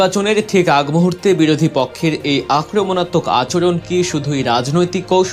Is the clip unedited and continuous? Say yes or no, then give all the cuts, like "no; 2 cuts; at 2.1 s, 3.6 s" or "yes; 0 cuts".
yes; 0 cuts